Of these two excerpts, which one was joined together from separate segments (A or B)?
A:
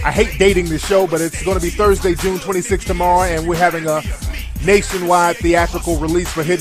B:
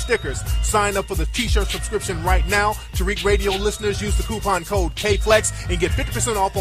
B